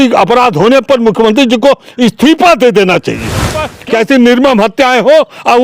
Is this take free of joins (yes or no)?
no